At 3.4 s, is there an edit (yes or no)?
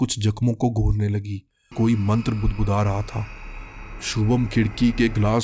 no